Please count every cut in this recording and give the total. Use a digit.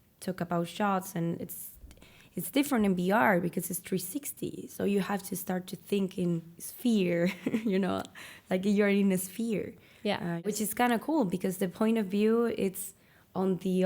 1